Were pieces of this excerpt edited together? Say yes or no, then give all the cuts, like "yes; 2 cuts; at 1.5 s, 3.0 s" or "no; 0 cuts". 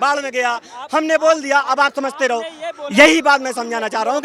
no; 0 cuts